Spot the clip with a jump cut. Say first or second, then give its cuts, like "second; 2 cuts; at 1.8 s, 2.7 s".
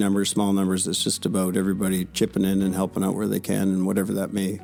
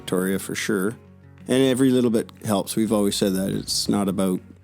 second; 1 cut; at 1.2 s